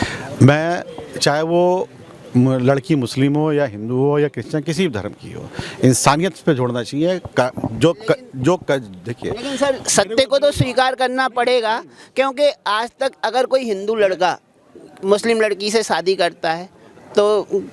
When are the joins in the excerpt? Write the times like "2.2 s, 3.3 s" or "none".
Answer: none